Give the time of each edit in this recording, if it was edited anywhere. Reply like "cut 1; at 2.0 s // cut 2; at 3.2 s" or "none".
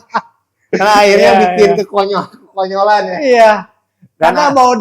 none